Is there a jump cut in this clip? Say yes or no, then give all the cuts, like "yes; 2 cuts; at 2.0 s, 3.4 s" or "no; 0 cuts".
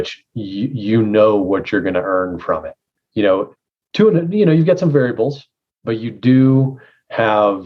no; 0 cuts